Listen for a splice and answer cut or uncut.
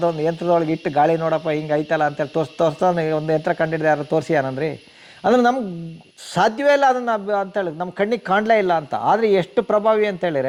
uncut